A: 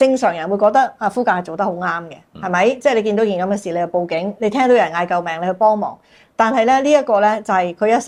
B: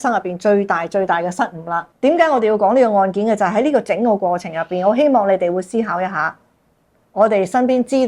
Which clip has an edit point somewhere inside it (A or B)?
B